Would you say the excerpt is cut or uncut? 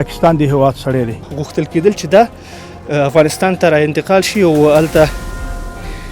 cut